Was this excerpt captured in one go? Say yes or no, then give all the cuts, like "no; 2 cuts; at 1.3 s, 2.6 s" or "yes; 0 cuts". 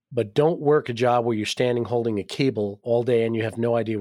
no; 1 cut; at 2.8 s